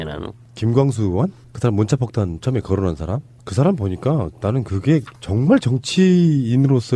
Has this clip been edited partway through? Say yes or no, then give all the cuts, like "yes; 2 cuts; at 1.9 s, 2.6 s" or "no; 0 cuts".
no; 0 cuts